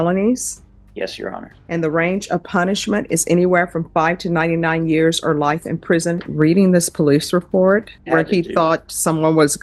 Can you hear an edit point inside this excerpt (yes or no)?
yes